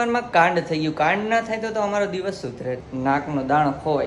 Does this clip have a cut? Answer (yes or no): yes